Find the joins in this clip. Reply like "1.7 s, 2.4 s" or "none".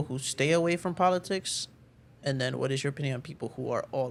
none